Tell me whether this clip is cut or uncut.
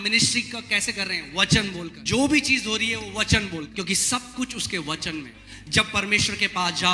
cut